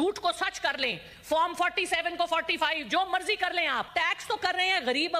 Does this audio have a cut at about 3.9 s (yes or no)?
yes